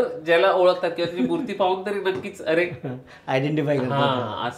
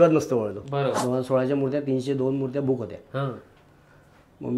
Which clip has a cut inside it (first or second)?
second